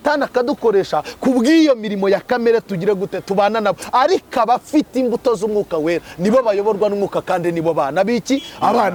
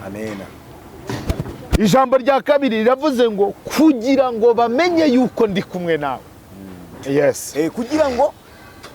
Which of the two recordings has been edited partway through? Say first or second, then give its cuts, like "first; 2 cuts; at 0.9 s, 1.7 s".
second; 1 cut; at 7.0 s